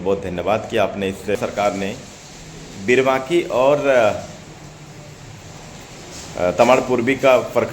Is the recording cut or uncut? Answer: cut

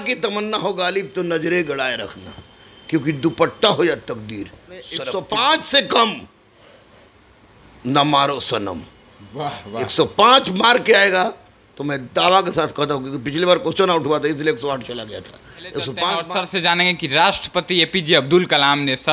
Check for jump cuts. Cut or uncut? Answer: cut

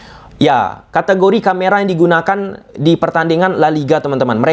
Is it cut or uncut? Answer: uncut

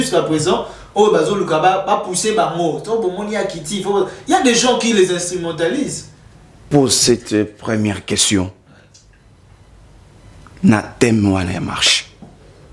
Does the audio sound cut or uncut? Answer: cut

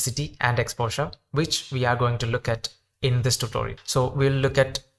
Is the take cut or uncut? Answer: uncut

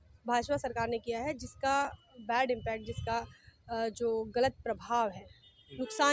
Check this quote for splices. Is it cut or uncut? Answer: uncut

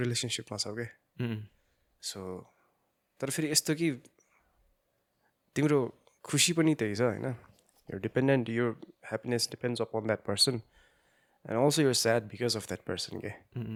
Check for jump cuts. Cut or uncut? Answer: uncut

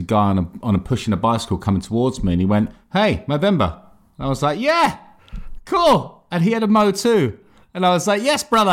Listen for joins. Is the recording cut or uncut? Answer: uncut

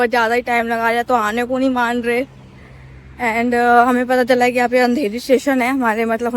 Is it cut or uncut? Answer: uncut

